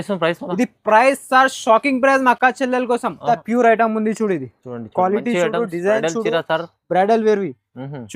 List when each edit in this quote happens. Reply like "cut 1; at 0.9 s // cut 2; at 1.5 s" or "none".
cut 1; at 3.2 s